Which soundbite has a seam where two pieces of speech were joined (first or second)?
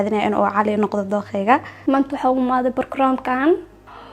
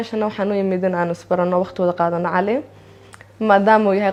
first